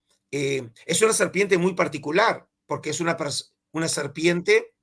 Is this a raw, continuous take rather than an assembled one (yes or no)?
yes